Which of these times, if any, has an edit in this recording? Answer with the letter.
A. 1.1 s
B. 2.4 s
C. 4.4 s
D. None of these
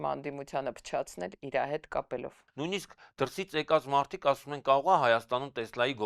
B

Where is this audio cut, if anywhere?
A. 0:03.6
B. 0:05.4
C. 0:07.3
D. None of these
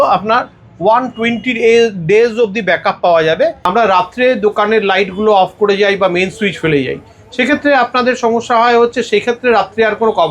A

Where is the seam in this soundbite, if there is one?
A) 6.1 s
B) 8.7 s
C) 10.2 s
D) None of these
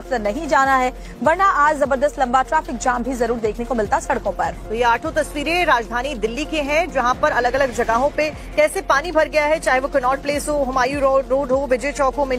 C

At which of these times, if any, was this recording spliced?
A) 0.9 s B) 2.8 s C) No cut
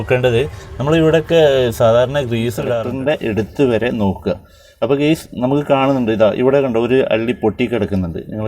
B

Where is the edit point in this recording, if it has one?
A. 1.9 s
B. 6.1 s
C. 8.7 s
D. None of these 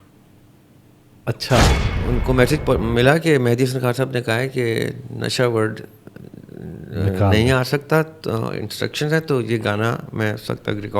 A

